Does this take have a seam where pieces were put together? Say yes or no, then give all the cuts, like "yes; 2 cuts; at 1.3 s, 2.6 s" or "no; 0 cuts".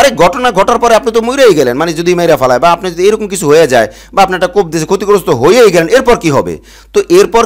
no; 0 cuts